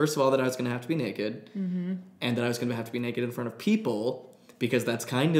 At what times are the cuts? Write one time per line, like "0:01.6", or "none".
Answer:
none